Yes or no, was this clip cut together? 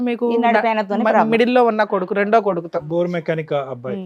no